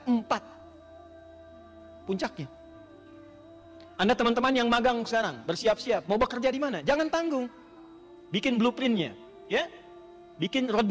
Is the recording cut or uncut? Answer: cut